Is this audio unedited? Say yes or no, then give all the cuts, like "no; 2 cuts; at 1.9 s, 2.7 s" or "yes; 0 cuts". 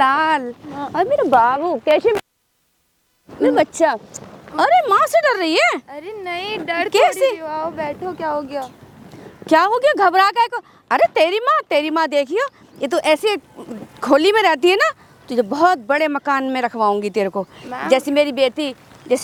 yes; 0 cuts